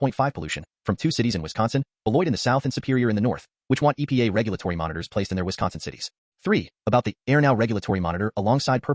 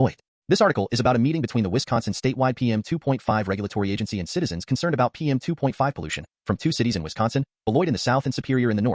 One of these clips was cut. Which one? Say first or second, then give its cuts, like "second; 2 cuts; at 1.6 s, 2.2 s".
first; 1 cut; at 6.2 s